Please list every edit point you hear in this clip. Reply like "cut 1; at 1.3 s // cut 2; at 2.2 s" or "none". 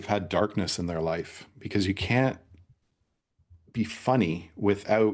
none